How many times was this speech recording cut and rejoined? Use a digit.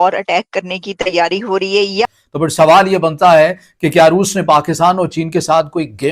1